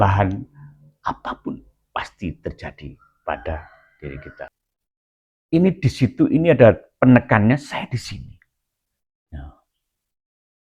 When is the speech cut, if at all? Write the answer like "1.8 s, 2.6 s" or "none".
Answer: 4.6 s